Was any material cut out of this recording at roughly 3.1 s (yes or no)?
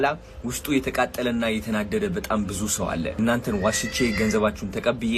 yes